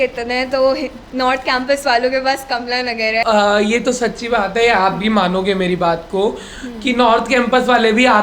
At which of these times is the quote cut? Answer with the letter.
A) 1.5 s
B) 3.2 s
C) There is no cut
B